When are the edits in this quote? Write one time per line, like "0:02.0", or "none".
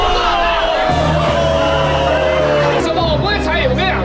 0:02.8